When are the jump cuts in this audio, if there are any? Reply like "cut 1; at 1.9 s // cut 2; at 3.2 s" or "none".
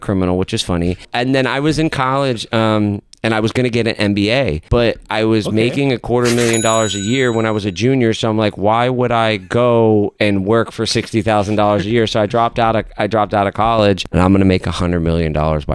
cut 1; at 1.1 s // cut 2; at 4.6 s // cut 3; at 14.0 s